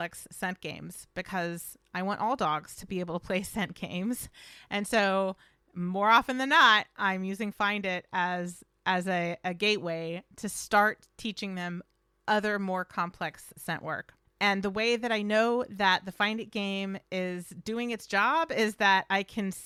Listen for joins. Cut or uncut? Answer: uncut